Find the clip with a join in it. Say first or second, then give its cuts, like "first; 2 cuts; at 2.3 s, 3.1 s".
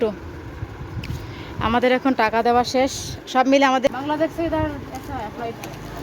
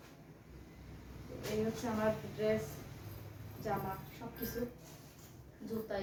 first; 1 cut; at 3.9 s